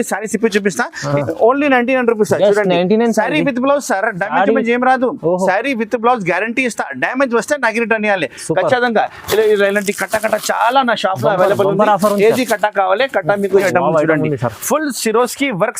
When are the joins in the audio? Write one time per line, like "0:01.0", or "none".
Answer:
0:01.0
0:13.6

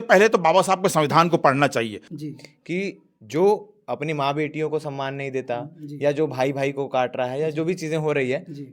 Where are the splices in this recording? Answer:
0:02.1

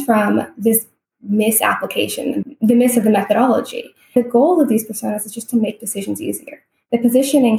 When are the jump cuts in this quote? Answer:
0:02.4
0:04.1

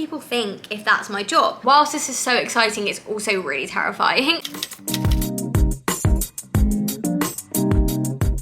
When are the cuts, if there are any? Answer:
0:01.6
0:04.5

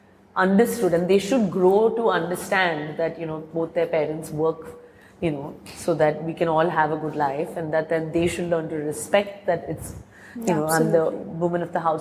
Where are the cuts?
none

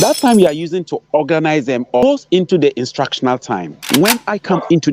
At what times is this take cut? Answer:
0:02.0
0:03.7

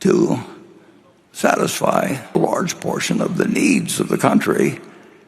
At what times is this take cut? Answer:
0:02.3

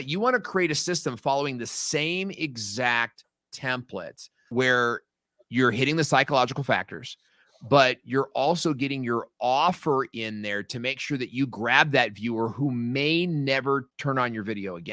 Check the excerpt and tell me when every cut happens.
0:04.3
0:13.9

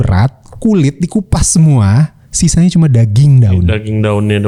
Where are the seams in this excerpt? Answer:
none

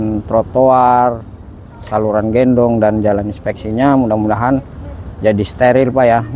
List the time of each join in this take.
none

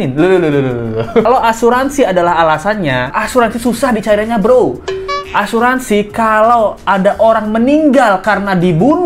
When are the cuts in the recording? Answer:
0:01.3
0:03.2

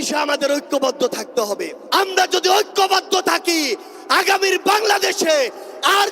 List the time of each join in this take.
0:01.7

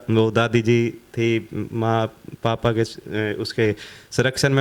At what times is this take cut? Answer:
none

